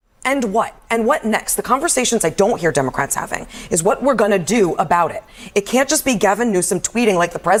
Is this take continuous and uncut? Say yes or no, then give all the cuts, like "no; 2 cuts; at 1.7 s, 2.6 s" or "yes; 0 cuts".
yes; 0 cuts